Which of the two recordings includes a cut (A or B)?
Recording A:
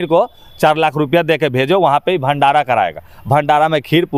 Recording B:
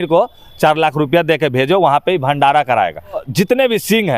B